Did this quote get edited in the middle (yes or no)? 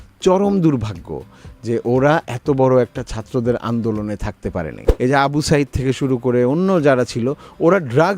yes